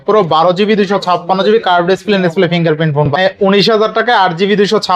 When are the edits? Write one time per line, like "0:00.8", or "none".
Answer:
0:03.1